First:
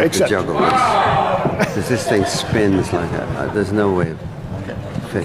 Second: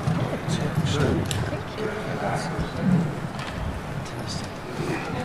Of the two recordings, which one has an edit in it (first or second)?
second